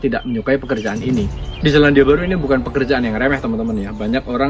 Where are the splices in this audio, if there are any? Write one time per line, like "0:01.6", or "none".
0:01.4